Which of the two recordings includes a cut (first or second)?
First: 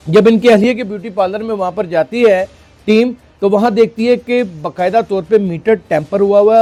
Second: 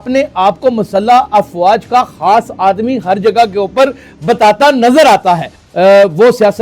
second